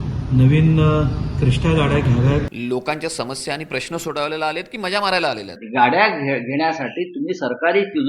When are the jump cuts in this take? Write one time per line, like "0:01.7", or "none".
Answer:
0:02.5
0:05.6